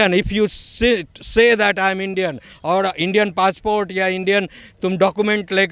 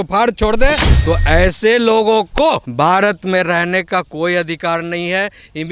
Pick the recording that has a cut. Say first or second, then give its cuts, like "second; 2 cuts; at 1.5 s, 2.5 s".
second; 2 cuts; at 0.9 s, 2.7 s